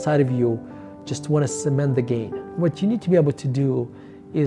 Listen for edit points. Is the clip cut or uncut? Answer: cut